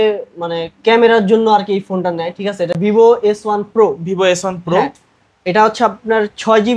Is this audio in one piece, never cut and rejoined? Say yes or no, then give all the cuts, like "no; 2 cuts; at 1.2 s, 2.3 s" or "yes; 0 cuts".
no; 1 cut; at 2.8 s